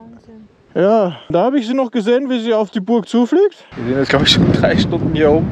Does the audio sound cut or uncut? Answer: cut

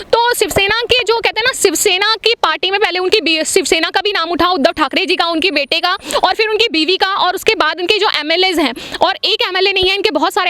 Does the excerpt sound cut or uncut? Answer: uncut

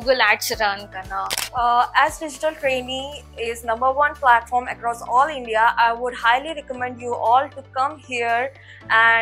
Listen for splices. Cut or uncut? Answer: cut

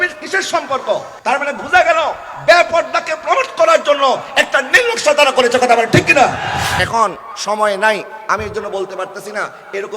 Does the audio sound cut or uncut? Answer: cut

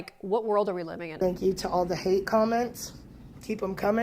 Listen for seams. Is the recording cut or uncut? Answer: cut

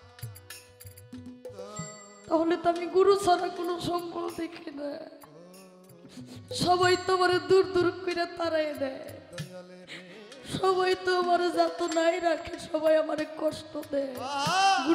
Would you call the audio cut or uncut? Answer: uncut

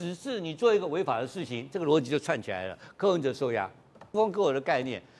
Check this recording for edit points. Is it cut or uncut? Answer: cut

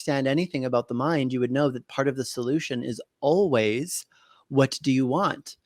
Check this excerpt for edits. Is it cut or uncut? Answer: uncut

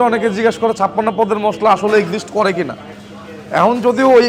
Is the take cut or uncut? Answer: uncut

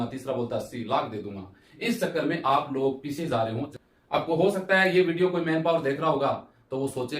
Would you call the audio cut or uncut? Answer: cut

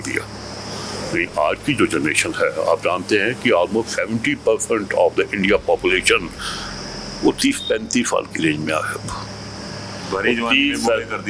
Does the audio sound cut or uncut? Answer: uncut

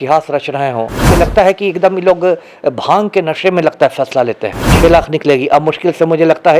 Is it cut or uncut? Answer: cut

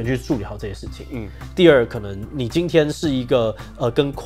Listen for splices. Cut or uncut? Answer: uncut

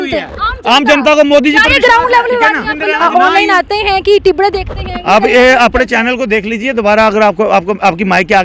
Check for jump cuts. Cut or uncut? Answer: cut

